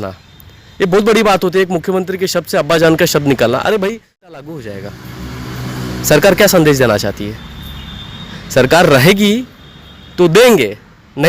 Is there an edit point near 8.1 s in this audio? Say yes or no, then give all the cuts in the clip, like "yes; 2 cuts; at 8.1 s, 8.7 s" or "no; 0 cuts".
no; 1 cut; at 4.3 s